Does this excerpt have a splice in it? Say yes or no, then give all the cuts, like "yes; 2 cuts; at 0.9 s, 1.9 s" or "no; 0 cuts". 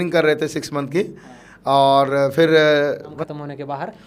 yes; 1 cut; at 3.1 s